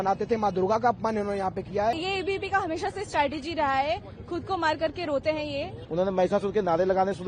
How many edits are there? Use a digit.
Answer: 2